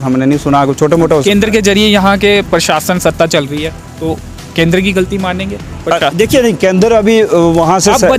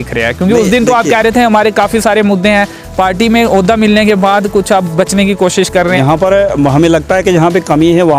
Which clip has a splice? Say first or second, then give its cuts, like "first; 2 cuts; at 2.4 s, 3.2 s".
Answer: second; 1 cut; at 6.0 s